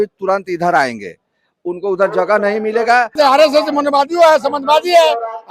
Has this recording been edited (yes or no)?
yes